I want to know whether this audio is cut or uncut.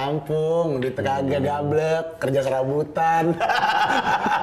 uncut